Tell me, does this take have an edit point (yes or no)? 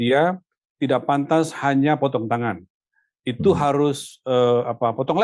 no